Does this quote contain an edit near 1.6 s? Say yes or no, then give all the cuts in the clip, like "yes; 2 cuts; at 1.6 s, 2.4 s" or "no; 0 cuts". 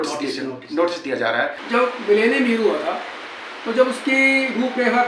yes; 1 cut; at 1.6 s